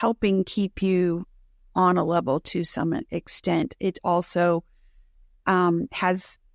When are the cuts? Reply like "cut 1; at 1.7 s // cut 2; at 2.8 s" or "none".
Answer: none